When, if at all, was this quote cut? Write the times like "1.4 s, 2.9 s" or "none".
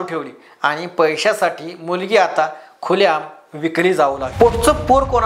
4.2 s